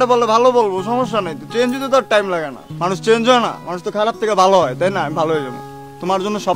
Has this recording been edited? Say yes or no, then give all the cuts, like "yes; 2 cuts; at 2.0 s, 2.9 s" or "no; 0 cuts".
no; 0 cuts